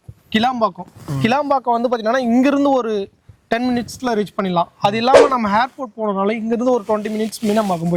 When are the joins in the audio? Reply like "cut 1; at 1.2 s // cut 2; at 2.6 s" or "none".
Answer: none